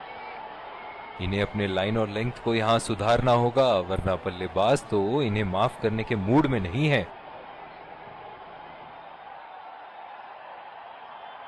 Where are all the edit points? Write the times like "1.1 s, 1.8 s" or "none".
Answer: 1.2 s, 7.1 s